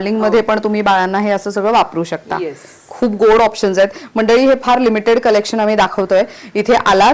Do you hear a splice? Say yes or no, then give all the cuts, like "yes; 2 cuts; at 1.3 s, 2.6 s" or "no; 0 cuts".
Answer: no; 0 cuts